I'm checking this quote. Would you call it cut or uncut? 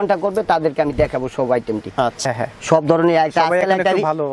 cut